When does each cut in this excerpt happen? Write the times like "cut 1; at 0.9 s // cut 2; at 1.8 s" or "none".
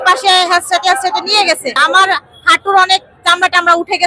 cut 1; at 1.8 s